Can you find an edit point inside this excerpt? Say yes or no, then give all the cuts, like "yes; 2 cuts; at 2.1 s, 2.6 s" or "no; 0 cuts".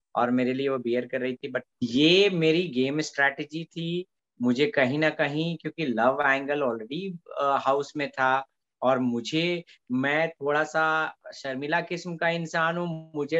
yes; 1 cut; at 1.7 s